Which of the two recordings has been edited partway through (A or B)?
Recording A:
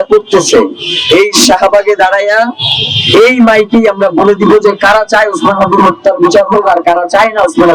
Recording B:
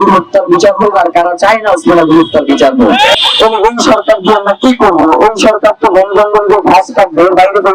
B